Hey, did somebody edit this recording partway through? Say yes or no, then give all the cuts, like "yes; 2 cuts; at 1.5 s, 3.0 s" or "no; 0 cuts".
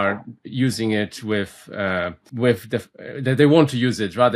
yes; 1 cut; at 2.2 s